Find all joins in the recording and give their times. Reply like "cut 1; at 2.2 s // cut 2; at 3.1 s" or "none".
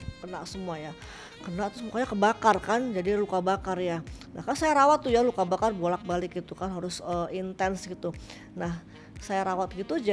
none